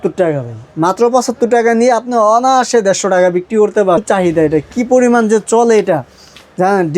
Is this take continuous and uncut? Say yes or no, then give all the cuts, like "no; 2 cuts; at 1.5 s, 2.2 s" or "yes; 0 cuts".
no; 1 cut; at 4.0 s